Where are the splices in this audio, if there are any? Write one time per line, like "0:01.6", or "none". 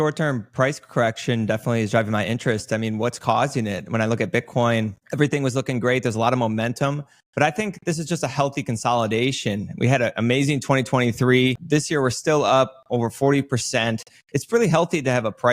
0:05.0
0:11.6